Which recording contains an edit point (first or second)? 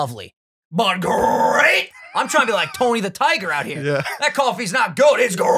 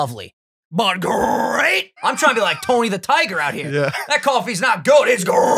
second